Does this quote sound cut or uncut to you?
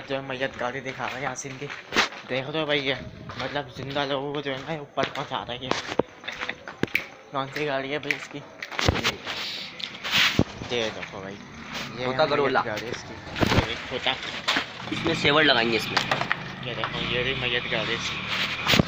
uncut